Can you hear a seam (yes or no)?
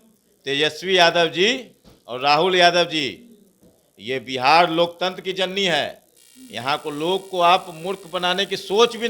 no